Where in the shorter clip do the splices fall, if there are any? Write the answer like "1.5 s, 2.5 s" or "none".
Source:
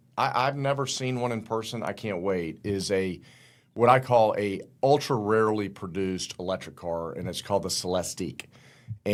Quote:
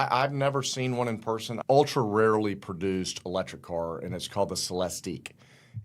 1.5 s